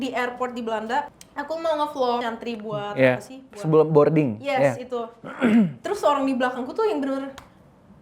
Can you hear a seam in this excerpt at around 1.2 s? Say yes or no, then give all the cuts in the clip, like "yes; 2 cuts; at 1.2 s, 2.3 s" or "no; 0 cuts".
yes; 2 cuts; at 1.2 s, 2.2 s